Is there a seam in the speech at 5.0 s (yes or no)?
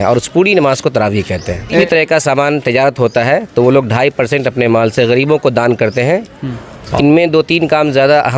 no